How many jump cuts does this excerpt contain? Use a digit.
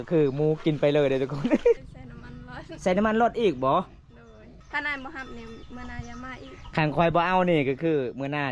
2